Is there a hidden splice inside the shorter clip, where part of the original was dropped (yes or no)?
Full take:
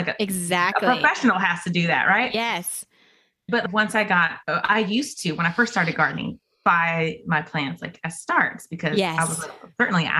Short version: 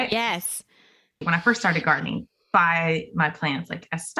yes